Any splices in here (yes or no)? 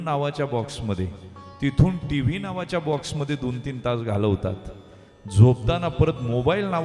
no